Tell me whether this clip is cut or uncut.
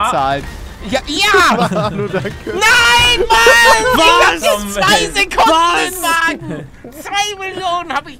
uncut